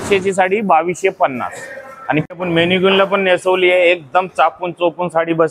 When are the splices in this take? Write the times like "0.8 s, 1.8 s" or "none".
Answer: 2.2 s